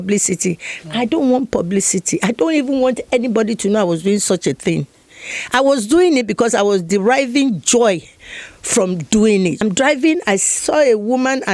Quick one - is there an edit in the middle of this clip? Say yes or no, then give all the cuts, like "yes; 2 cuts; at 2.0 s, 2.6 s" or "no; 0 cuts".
yes; 1 cut; at 9.6 s